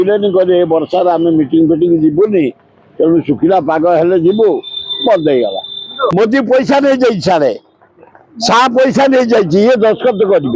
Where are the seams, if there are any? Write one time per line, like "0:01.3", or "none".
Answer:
0:06.1